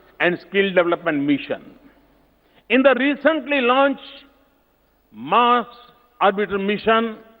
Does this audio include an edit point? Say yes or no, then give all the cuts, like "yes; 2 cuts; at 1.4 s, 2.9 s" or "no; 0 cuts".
no; 0 cuts